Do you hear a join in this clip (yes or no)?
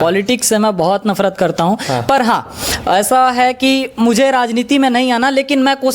no